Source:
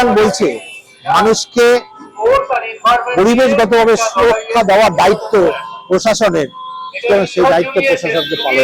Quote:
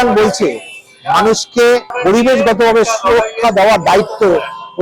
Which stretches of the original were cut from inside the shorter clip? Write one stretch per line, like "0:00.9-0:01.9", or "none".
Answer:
0:01.9-0:03.1